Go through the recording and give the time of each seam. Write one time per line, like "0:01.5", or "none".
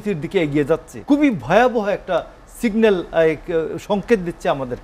0:00.9